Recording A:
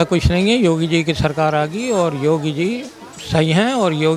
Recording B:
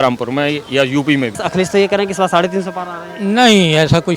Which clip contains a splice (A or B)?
B